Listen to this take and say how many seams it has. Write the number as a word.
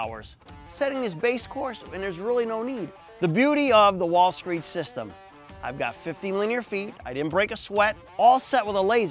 two